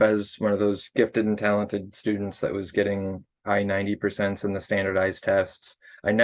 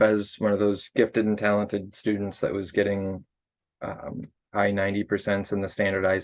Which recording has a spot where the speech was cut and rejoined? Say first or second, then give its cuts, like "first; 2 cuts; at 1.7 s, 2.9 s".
first; 1 cut; at 3.3 s